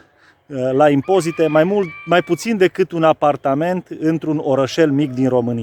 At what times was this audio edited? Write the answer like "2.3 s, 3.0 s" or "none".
none

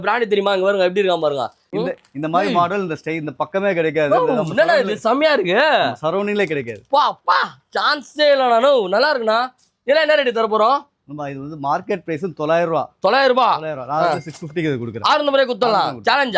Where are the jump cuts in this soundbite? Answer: 1.6 s

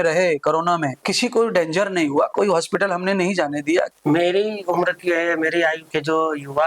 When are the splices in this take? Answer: 1.0 s, 3.9 s

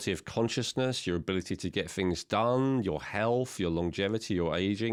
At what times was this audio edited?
none

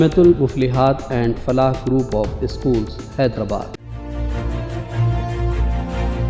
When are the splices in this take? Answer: 3.8 s

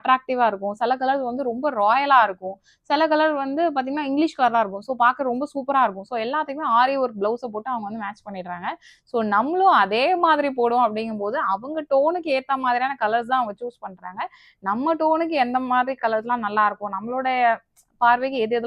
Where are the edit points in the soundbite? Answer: none

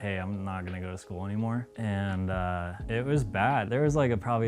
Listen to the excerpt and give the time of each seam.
1.7 s, 2.8 s, 3.7 s

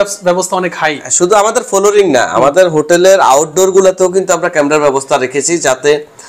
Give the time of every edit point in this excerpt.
none

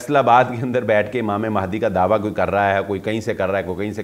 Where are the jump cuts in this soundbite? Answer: none

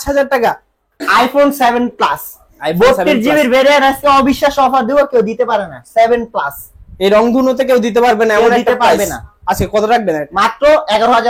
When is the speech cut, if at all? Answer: 0.9 s

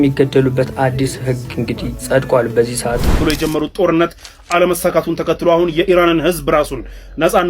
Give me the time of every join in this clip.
3.2 s

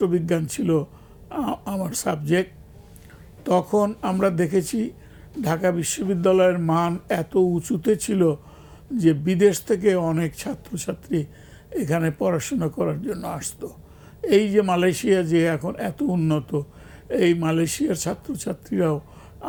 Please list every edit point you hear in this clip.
none

